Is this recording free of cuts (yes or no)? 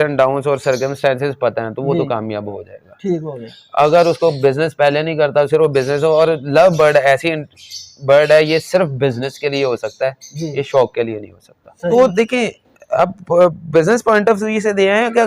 no